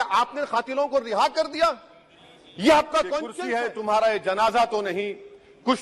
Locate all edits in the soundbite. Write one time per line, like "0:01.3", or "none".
0:03.3